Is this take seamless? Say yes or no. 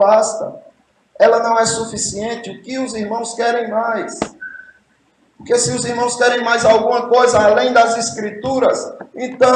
yes